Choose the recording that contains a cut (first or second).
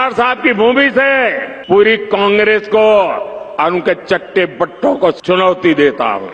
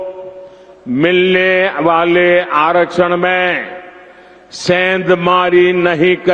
first